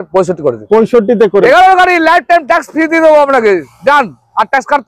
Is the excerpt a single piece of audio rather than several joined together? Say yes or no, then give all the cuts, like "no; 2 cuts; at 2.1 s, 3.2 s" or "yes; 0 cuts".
no; 1 cut; at 1.4 s